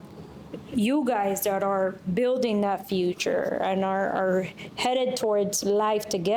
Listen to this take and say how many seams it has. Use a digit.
0